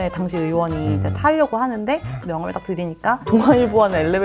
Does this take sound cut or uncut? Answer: cut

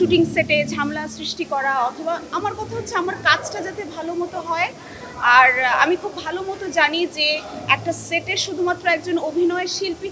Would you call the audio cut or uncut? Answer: uncut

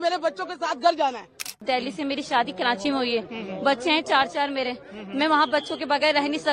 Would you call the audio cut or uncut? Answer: cut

